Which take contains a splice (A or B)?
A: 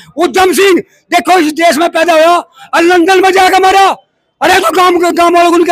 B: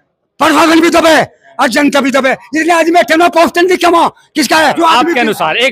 B